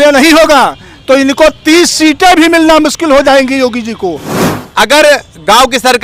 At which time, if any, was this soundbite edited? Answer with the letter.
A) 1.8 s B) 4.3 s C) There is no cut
B